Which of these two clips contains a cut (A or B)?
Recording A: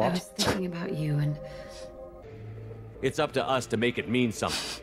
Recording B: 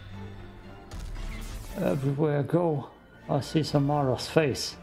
A